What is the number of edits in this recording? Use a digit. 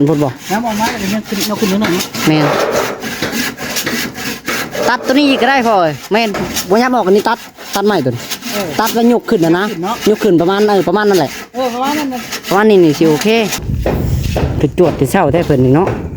1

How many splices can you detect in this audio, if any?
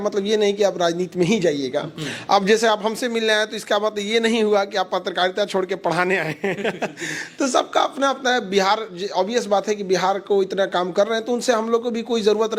0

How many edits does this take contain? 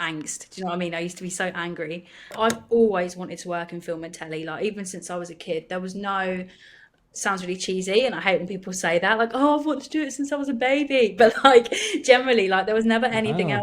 1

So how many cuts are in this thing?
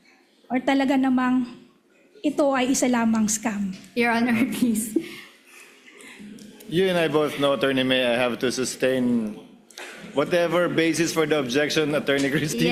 0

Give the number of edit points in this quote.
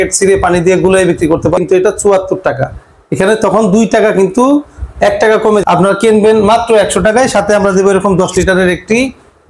2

